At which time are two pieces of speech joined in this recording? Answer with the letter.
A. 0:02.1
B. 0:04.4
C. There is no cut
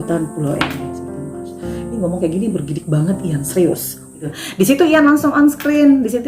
B